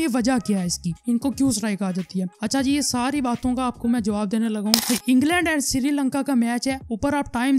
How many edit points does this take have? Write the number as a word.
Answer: one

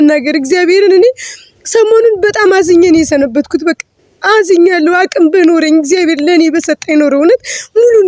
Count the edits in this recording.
zero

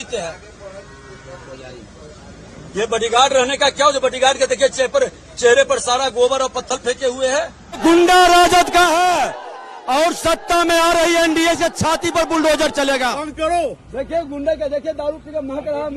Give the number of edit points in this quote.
two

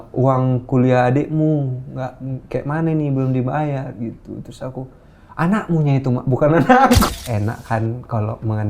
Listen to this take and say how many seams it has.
one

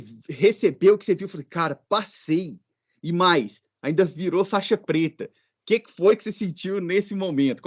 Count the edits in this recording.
zero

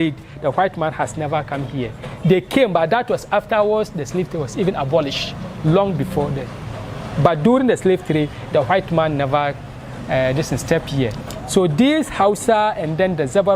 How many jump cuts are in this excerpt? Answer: one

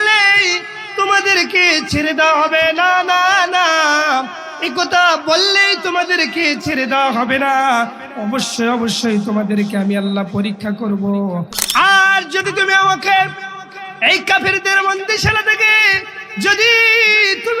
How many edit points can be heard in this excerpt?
one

